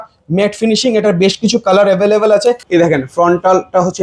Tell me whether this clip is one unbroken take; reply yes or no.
no